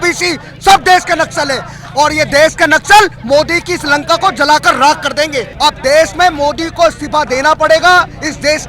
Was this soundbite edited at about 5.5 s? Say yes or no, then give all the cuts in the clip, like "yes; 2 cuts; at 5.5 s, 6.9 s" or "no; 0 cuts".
yes; 1 cut; at 5.5 s